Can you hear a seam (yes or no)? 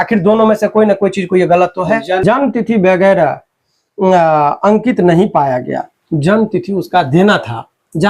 yes